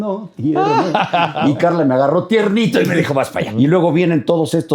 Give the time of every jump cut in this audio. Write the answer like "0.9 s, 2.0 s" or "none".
1.4 s, 3.4 s